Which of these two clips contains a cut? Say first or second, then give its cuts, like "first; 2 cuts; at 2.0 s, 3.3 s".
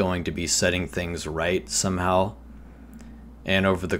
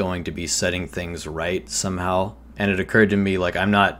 second; 1 cut; at 2.4 s